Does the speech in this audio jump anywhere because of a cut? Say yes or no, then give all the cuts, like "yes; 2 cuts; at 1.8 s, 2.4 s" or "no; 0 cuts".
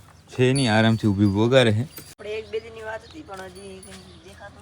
yes; 1 cut; at 2.1 s